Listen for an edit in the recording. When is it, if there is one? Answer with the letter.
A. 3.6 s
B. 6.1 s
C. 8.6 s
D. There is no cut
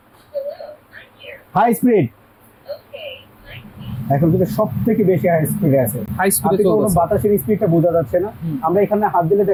D